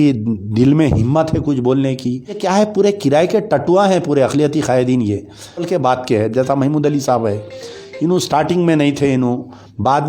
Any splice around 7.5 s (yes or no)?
no